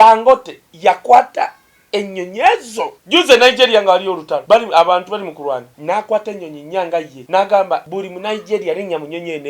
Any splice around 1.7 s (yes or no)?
no